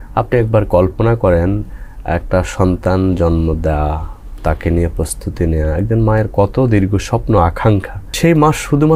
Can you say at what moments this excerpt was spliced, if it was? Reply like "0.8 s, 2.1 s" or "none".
8.0 s

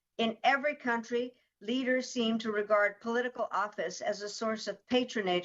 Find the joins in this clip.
none

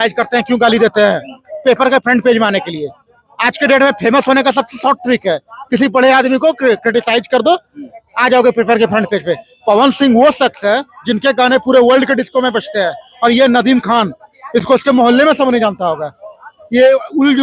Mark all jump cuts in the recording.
none

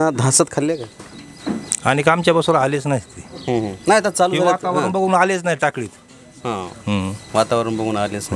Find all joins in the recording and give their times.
none

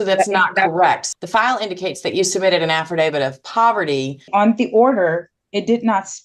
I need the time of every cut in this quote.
1.0 s, 4.3 s

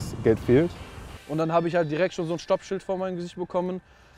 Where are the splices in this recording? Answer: 1.1 s

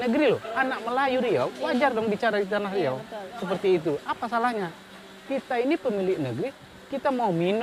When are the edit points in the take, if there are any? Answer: none

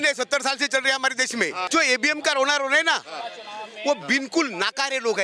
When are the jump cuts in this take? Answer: 1.6 s

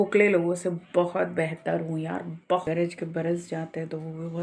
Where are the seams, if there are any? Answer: 2.6 s

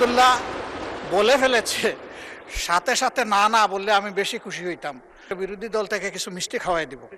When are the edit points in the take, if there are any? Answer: 5.3 s

